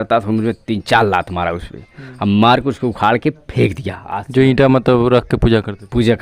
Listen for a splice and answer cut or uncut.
uncut